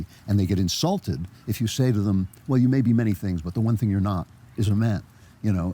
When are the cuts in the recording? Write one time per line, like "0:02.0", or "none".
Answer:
none